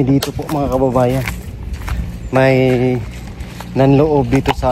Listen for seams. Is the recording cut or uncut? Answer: uncut